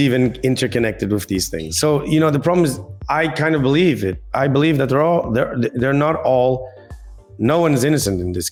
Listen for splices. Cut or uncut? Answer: uncut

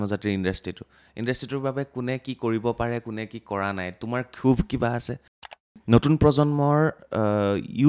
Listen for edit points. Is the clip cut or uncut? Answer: cut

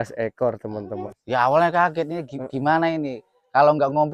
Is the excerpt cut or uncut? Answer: cut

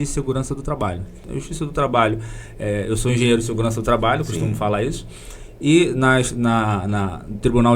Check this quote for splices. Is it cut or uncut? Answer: cut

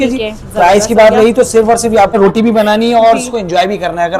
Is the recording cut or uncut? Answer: cut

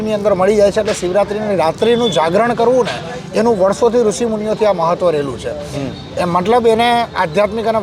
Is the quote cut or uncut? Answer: uncut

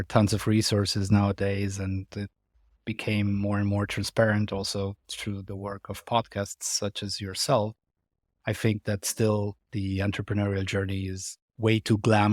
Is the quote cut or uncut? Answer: uncut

